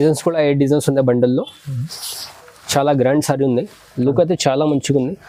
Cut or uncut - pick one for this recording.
uncut